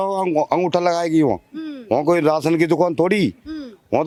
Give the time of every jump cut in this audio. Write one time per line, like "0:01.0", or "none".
none